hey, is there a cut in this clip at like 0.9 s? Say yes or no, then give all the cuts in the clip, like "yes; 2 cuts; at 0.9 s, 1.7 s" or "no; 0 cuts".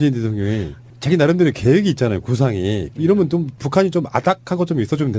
no; 0 cuts